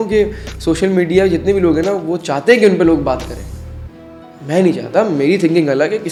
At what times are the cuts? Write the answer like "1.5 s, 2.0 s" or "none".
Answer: none